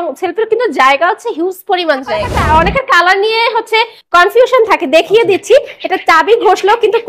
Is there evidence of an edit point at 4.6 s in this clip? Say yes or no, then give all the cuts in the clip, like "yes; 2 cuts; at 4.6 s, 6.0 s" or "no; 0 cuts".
no; 1 cut; at 2.4 s